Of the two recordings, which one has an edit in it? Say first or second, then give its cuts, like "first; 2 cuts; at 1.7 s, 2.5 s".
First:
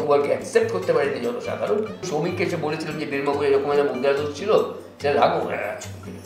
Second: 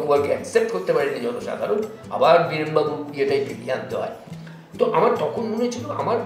first; 1 cut; at 2.0 s